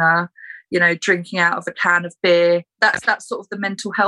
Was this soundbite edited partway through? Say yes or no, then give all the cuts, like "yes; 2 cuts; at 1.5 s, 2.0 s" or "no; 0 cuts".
yes; 1 cut; at 2.7 s